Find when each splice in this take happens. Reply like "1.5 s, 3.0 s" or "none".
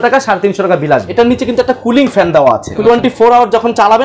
1.1 s, 2.8 s